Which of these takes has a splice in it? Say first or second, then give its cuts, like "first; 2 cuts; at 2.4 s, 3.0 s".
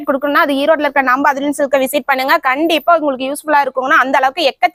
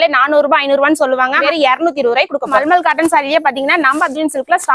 second; 2 cuts; at 1.4 s, 2.6 s